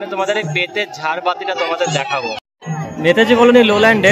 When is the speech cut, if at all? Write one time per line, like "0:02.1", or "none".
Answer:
0:02.4